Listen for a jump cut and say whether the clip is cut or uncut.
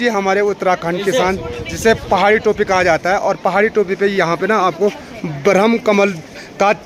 uncut